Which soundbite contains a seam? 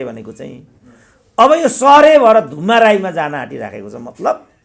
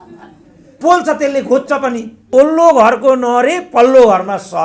second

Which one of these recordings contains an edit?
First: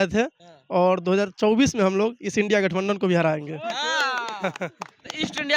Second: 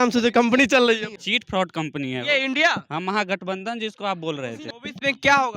second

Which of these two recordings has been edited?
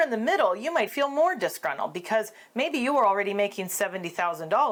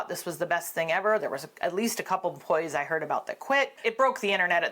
second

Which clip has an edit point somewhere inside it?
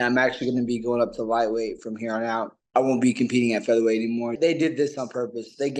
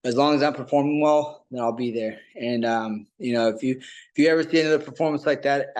first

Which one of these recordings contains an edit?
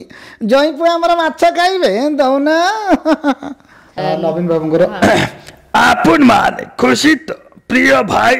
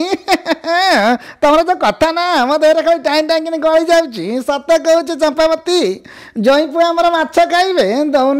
first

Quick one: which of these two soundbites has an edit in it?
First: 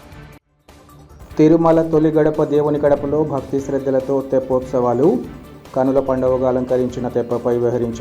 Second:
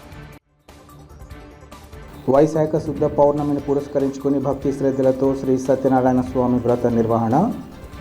second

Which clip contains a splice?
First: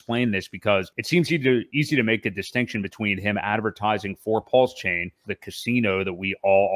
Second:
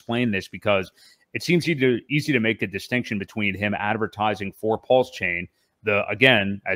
first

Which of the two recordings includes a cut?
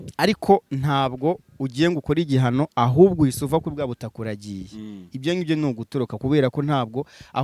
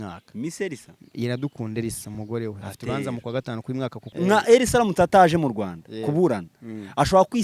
second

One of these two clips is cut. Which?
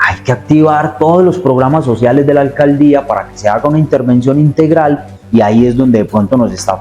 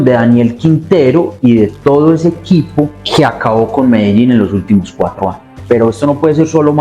second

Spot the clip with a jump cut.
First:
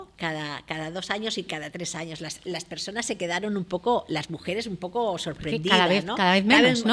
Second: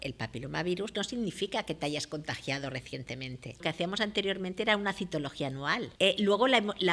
second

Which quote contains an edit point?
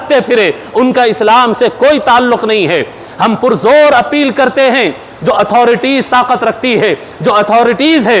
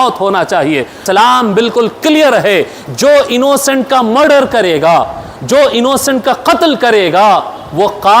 second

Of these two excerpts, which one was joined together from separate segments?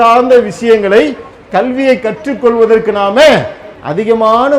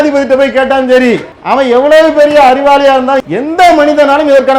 second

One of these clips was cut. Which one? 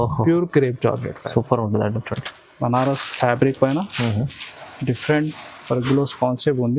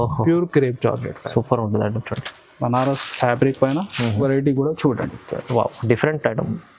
second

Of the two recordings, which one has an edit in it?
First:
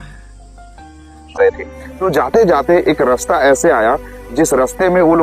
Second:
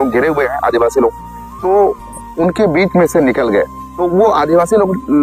first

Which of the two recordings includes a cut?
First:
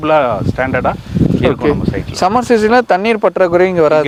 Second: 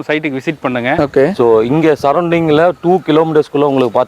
second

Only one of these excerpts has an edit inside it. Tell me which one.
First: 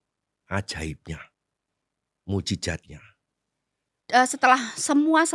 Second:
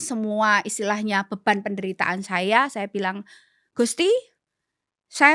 first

